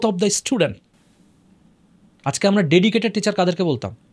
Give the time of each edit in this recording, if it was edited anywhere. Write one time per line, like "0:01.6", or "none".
none